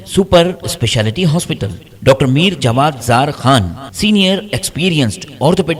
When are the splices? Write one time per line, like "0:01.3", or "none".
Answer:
none